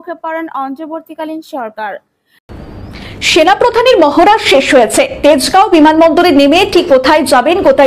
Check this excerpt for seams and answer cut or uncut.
uncut